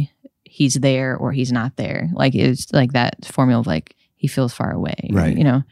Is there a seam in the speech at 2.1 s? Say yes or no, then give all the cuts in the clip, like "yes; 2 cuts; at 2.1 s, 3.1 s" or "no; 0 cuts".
no; 1 cut; at 4.0 s